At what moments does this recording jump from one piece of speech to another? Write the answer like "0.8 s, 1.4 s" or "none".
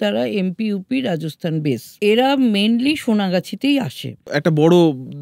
1.9 s, 4.2 s

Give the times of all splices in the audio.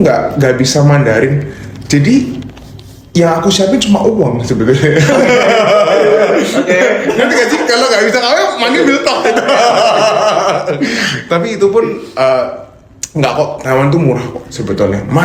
none

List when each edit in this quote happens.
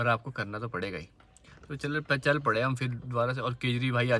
none

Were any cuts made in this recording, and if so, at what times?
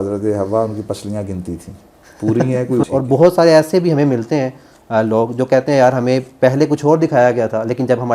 2.8 s

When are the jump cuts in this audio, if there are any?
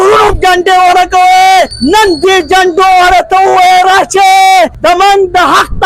1.7 s, 4.8 s

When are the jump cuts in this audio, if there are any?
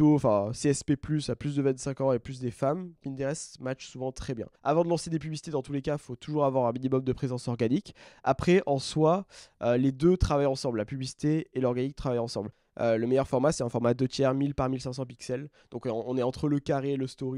4.5 s, 12.6 s

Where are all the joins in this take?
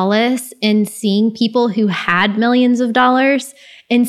none

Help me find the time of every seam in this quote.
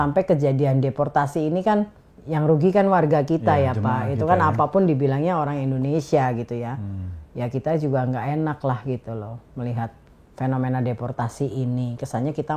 none

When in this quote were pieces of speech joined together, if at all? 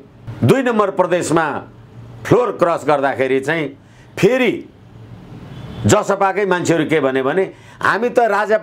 none

